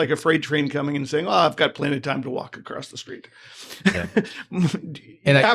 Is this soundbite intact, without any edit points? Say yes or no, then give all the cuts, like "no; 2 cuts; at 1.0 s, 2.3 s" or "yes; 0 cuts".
yes; 0 cuts